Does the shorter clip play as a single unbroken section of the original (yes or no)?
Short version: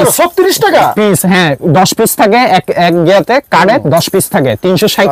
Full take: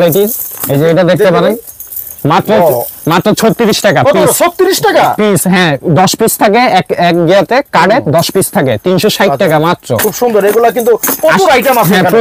yes